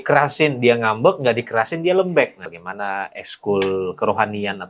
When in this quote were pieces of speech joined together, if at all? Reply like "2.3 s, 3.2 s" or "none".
2.4 s